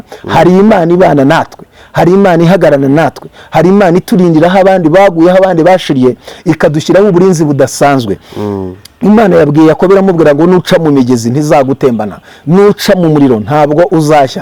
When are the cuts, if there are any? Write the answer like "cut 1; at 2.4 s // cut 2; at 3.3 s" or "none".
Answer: none